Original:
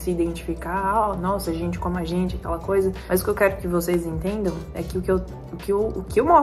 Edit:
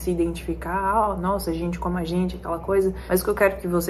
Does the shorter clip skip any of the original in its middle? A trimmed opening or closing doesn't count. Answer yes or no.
no